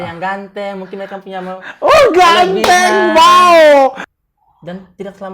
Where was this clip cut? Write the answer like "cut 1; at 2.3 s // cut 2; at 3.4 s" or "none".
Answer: cut 1; at 4.0 s